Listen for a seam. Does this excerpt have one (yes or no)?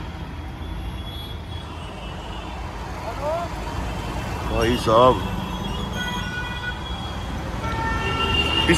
no